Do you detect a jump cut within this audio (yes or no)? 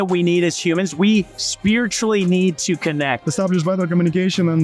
yes